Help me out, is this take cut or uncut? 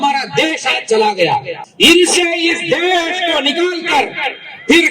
cut